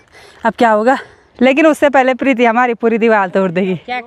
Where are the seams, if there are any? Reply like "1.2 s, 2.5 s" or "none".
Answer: 1.2 s

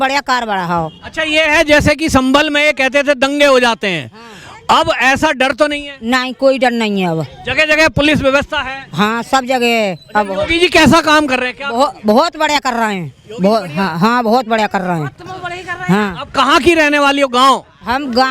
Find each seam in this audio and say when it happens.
none

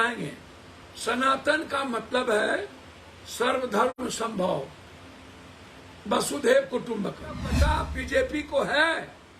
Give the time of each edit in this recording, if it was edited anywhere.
7.5 s

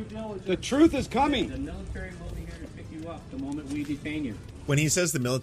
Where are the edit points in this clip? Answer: 4.5 s

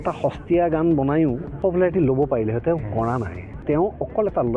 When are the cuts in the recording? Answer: 1.5 s, 3.5 s

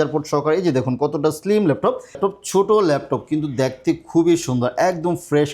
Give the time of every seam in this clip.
2.2 s

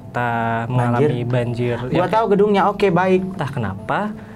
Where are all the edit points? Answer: 3.4 s

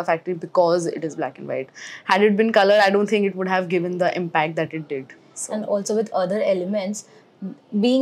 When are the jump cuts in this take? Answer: none

